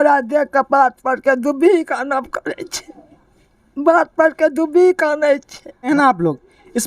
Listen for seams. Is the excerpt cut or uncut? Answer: cut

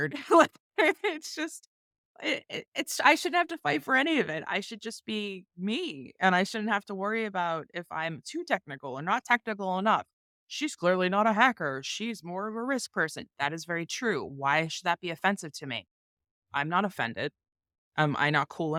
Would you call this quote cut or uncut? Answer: uncut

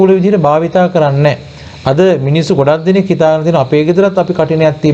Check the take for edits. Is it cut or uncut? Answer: uncut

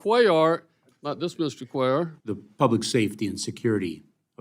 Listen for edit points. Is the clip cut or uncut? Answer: cut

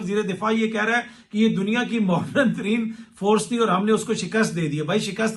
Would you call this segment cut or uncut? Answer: uncut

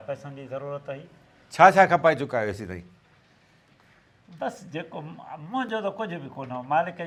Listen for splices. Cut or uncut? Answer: uncut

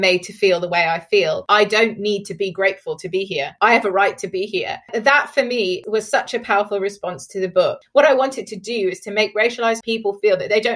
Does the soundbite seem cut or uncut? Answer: cut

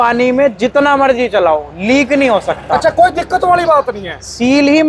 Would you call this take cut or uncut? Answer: uncut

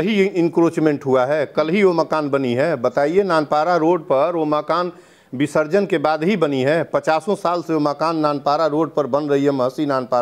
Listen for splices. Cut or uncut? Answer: uncut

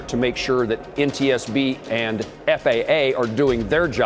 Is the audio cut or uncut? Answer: cut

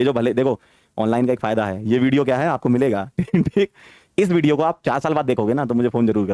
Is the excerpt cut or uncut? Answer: uncut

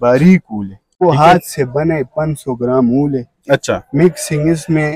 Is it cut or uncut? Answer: cut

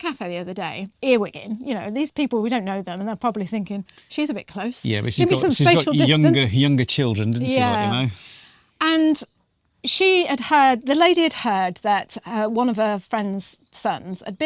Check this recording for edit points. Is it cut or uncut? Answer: uncut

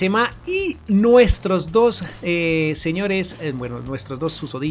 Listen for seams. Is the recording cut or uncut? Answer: uncut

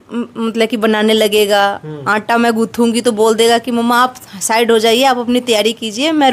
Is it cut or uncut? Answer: uncut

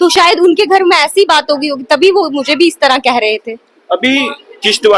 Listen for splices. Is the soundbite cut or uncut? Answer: uncut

